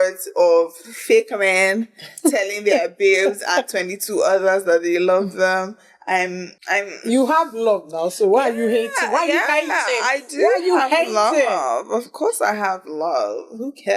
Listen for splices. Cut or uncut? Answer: cut